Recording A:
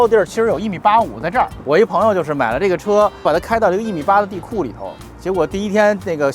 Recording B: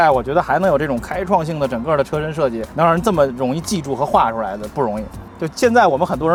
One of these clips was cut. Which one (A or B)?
A